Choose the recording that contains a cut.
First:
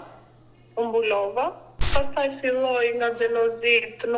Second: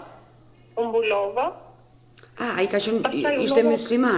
first; 1 cut; at 1.9 s

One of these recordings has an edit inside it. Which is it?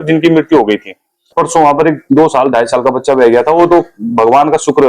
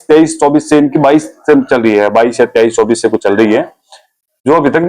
first; 1 cut; at 1.3 s

